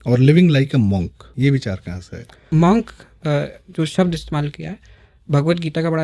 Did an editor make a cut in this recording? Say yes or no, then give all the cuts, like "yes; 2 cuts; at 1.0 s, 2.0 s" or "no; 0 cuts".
yes; 2 cuts; at 1.2 s, 2.5 s